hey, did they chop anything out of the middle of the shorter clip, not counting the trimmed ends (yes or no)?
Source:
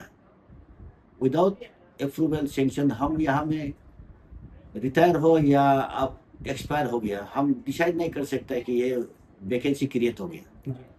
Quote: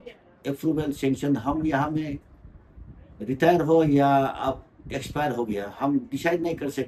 no